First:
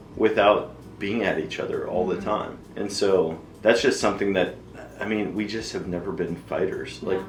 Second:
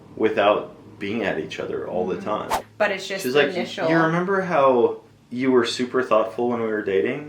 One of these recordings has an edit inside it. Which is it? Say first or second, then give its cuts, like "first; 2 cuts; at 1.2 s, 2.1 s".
second; 1 cut; at 2.6 s